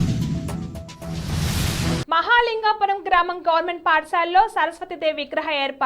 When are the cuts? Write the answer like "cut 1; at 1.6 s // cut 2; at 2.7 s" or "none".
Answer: cut 1; at 2.0 s